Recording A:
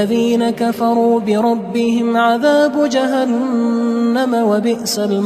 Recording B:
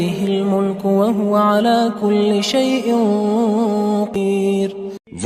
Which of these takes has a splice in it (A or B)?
B